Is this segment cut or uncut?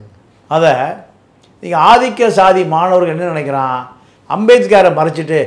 uncut